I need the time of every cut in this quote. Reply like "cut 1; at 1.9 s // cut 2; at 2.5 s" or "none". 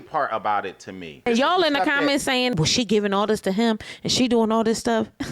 cut 1; at 1.3 s